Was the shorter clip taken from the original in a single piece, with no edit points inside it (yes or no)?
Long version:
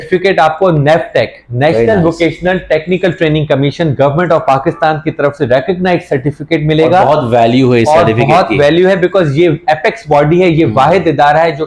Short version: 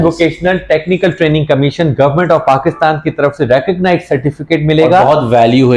yes